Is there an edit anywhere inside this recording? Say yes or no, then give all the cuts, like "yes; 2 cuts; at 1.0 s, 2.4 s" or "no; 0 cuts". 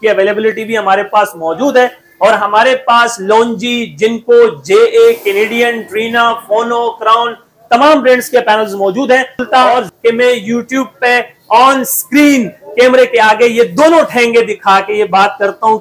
yes; 1 cut; at 9.5 s